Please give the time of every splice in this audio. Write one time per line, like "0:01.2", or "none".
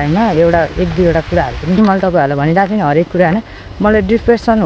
0:01.8